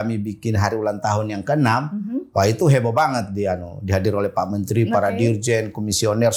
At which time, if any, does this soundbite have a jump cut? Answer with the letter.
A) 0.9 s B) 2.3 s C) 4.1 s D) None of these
D